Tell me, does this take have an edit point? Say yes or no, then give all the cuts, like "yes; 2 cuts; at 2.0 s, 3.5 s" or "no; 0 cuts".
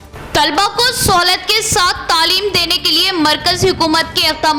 no; 0 cuts